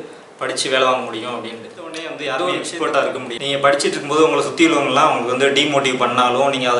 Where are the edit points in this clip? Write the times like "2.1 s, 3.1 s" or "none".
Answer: 2.3 s, 3.3 s